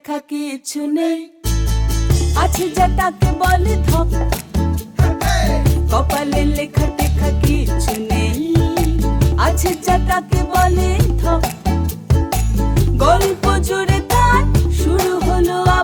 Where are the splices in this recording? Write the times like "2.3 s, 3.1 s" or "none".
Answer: none